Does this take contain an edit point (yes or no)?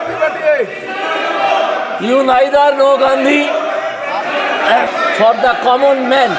yes